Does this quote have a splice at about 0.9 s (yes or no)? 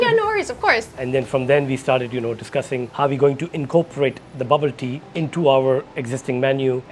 yes